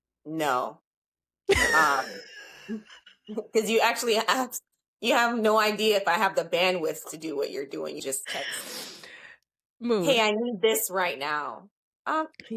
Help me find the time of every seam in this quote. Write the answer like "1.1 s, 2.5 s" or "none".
8.0 s

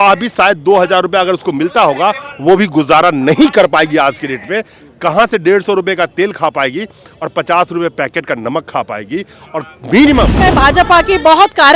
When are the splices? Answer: 10.4 s

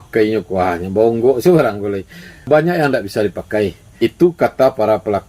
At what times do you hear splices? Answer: 2.5 s, 3.9 s

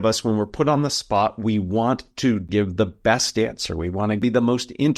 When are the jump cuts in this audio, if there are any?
2.5 s, 4.2 s

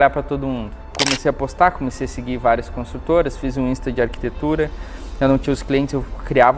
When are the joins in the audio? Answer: 0.9 s

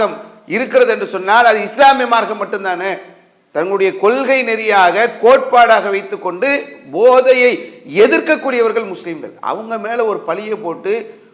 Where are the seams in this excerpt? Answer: none

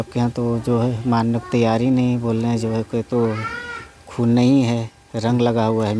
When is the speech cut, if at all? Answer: none

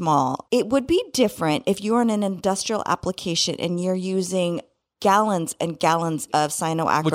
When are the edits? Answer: 6.2 s

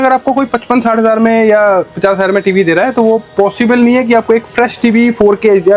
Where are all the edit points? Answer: none

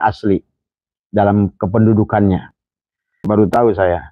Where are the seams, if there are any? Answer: 3.2 s

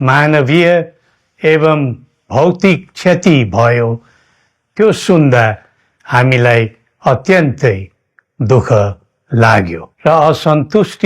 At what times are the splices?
9.8 s

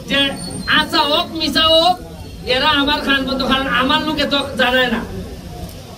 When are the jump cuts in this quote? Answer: none

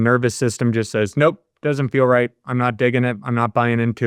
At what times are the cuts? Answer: none

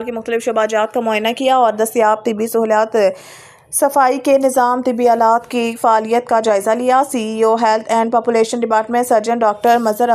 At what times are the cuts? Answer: none

